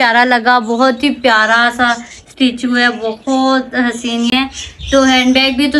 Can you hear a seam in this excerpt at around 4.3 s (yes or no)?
yes